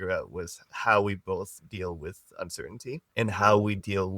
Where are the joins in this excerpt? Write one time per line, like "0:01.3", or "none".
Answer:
0:03.1